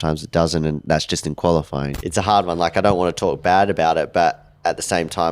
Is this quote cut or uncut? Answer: cut